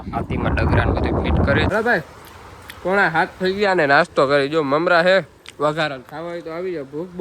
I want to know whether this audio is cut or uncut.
cut